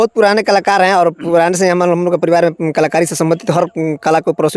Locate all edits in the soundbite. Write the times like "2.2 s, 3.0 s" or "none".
none